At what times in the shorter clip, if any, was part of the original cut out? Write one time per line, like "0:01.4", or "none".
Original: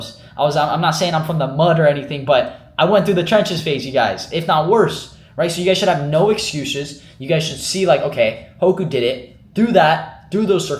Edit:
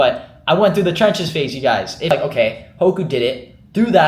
0:02.1